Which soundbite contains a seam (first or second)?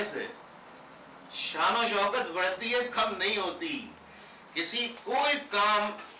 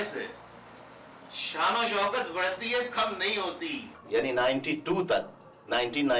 second